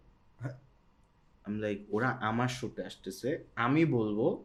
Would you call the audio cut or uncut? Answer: uncut